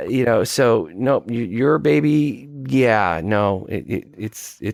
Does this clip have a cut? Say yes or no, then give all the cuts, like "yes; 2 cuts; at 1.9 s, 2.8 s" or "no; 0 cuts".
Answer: no; 0 cuts